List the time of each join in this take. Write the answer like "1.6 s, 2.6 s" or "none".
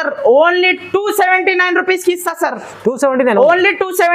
none